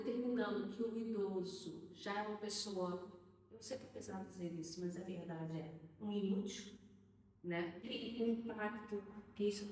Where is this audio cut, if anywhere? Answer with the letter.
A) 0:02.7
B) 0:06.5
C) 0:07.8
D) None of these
C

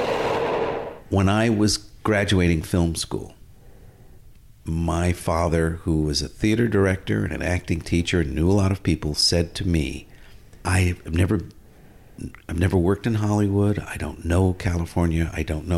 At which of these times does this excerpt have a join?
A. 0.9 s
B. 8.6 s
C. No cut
A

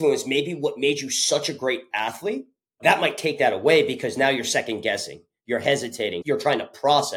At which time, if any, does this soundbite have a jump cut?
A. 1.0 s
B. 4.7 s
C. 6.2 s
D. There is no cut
C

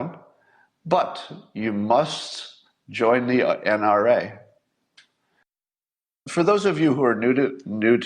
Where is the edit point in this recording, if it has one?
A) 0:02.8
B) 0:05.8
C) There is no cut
B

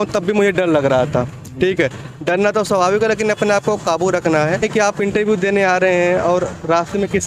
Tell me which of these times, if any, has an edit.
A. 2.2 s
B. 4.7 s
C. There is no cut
B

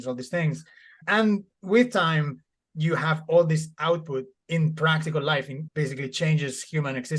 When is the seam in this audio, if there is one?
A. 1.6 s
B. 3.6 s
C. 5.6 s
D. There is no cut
C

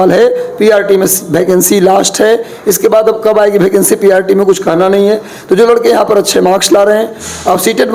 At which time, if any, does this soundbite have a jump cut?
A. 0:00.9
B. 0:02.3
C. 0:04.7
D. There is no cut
D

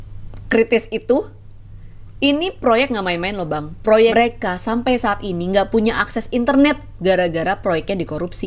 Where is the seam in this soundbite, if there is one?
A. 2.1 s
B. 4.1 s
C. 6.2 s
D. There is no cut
B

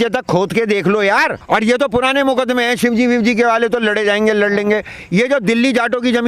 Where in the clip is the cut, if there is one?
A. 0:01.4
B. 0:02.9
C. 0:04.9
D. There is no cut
A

